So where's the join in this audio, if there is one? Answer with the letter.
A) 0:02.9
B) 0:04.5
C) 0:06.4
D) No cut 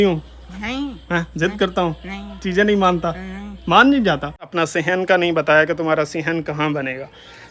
B